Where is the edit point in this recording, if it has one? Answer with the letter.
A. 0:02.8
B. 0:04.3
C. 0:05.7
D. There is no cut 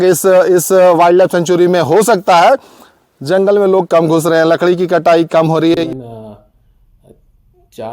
C